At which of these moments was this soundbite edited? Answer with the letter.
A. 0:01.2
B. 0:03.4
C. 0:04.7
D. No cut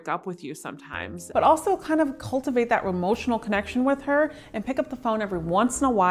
A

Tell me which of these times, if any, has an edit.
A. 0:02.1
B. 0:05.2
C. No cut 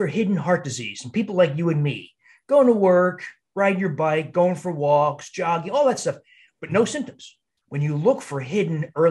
C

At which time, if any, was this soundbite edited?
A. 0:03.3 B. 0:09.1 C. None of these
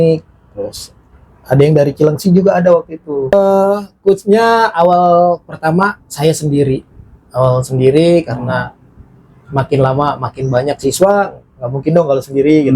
A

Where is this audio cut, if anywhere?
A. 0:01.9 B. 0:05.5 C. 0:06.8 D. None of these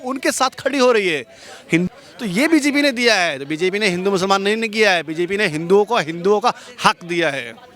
A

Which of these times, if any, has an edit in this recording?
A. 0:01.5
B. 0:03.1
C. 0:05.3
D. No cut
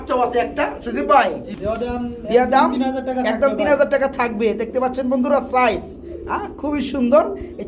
A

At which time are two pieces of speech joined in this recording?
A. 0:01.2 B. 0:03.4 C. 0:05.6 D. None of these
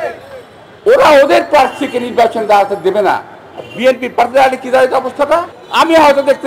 C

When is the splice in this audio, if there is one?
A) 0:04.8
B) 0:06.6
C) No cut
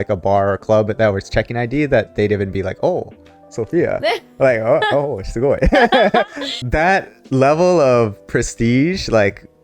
B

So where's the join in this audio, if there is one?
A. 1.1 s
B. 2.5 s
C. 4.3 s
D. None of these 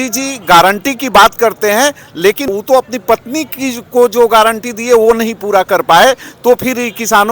B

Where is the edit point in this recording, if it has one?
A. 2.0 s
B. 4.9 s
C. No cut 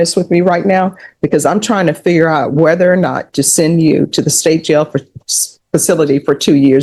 C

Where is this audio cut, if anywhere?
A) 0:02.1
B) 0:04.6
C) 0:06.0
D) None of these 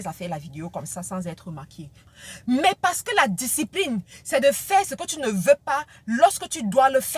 A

